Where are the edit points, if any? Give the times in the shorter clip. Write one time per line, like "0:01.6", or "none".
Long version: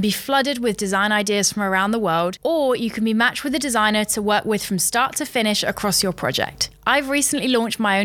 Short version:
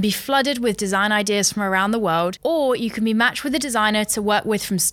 none